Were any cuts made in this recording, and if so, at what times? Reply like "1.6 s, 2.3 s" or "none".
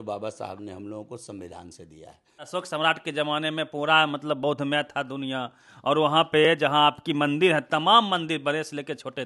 2.5 s